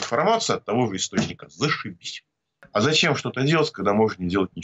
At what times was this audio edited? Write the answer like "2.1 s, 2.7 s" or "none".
2.5 s